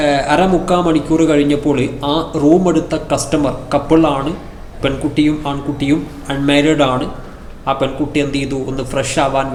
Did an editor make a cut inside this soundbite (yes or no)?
no